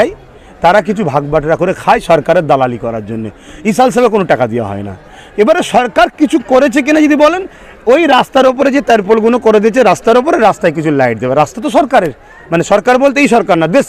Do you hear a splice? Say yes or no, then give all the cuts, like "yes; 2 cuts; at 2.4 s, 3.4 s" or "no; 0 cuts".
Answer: no; 0 cuts